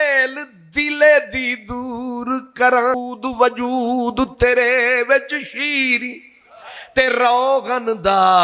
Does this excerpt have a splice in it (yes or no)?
yes